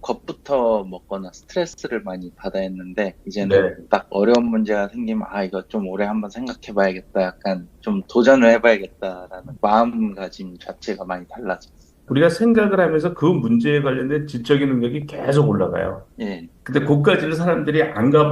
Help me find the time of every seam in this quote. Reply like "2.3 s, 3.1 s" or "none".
16.5 s

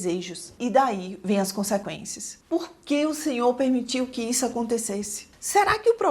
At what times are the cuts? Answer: 2.3 s

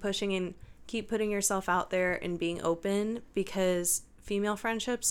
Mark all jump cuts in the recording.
none

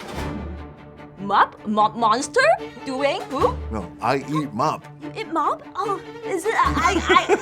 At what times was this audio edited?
1.1 s

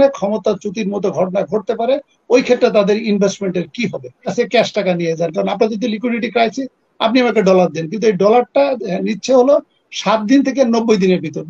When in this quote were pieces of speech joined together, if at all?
4.3 s

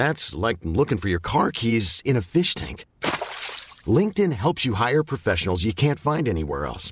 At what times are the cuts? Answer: none

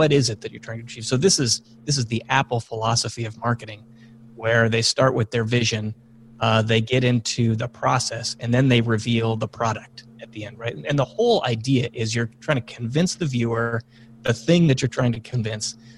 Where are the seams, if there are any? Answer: none

